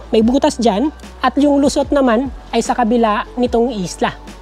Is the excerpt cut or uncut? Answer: uncut